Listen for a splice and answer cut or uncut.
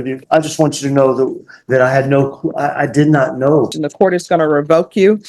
cut